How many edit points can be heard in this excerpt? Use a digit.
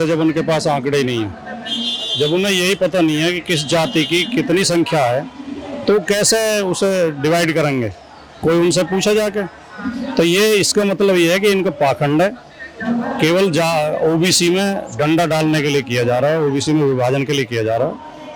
0